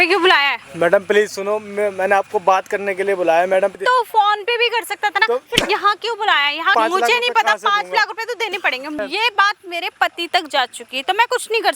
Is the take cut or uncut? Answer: cut